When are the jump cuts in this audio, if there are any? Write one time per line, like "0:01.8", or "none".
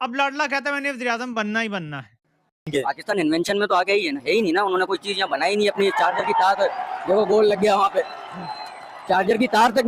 0:02.6